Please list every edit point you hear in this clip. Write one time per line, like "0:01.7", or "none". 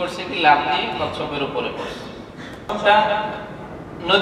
0:02.7